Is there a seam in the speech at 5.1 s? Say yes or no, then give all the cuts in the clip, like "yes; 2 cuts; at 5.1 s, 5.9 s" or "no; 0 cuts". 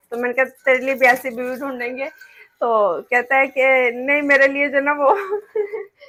no; 0 cuts